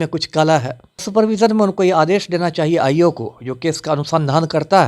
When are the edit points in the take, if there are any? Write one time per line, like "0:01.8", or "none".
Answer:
0:01.1

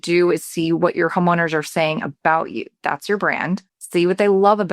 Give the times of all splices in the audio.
0:03.8

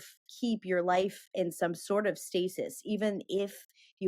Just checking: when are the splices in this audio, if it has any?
none

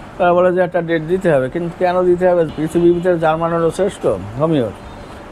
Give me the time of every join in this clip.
none

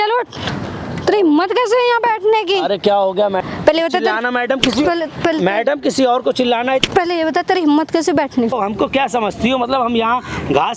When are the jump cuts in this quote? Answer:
0:03.4
0:08.5

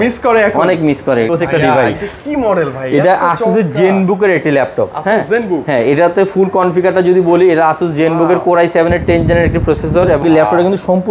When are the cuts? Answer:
0:01.3
0:10.2

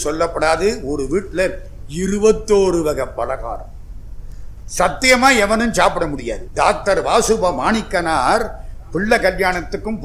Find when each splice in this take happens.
0:06.4

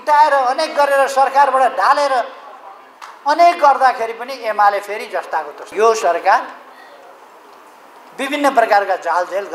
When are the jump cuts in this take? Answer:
0:05.7

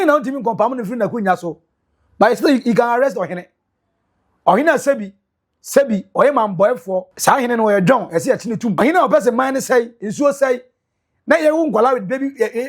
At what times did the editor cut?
0:07.1
0:08.8

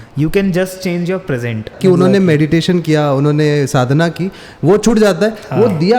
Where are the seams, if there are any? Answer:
0:01.7

